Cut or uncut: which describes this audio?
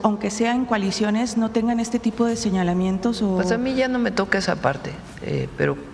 uncut